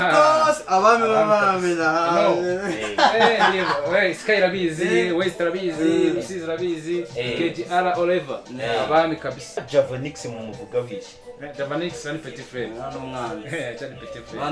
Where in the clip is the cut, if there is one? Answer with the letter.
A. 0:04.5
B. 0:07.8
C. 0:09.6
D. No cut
C